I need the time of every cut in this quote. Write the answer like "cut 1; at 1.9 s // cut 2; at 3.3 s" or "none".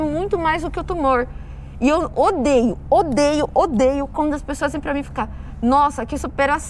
none